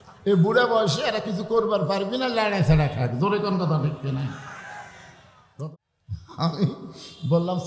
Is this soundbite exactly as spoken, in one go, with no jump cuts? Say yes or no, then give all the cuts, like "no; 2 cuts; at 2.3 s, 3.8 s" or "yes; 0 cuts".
no; 1 cut; at 5.6 s